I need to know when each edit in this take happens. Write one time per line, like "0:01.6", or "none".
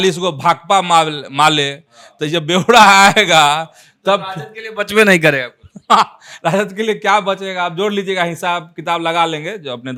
none